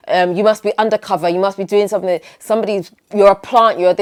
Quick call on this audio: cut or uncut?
uncut